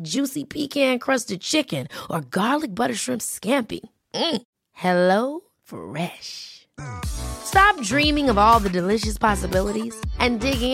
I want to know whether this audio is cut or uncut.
uncut